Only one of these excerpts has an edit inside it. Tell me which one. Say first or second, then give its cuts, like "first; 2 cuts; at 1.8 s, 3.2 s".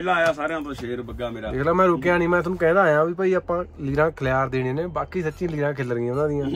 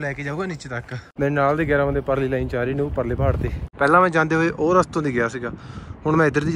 second; 2 cuts; at 1.0 s, 3.6 s